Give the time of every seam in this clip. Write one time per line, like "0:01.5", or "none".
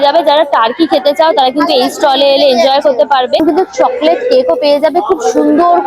0:03.4